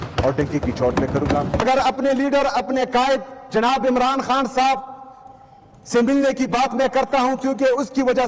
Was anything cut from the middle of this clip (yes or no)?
yes